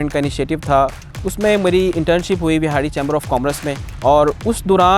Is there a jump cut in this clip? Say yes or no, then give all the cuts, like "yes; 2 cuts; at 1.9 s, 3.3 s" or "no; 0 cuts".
yes; 2 cuts; at 1.1 s, 3.8 s